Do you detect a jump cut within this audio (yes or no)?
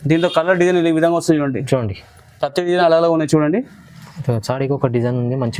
no